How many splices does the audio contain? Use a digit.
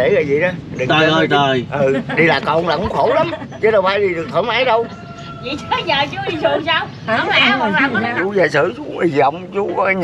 1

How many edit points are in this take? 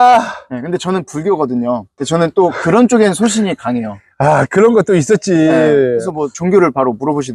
1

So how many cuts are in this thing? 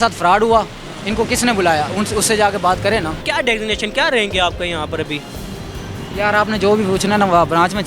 1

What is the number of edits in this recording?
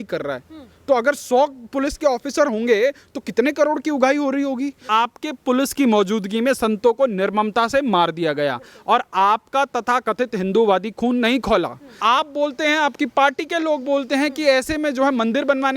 2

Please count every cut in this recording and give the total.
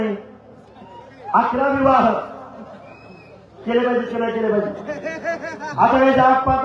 0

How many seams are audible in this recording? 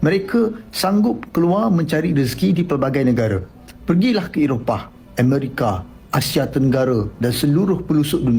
0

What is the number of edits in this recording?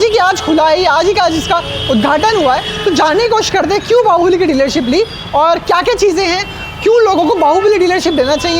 0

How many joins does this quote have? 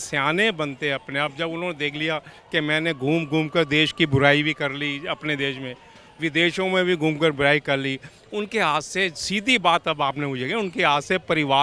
0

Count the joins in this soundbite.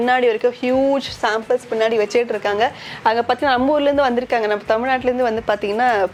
0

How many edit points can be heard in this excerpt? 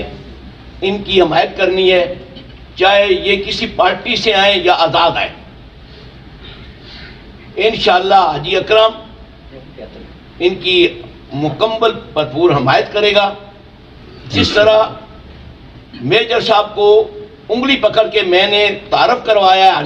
0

